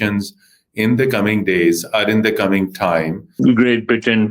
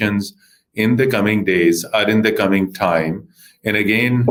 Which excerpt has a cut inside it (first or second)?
first